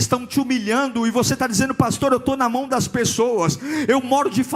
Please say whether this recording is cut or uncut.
uncut